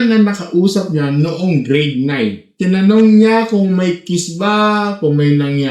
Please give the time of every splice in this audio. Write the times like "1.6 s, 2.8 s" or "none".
2.5 s